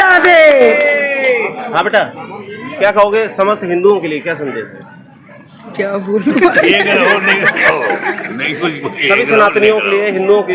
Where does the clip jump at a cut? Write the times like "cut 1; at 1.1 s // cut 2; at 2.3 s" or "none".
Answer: none